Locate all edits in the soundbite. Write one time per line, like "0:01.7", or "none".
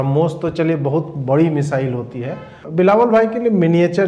0:02.6